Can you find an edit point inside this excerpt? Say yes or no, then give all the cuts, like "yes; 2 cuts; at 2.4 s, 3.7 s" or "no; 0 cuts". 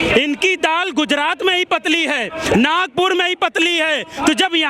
no; 0 cuts